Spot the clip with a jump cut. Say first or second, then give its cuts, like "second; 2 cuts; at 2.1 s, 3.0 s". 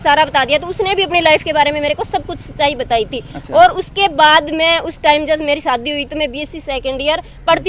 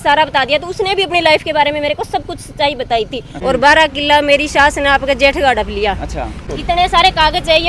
second; 2 cuts; at 3.3 s, 6.4 s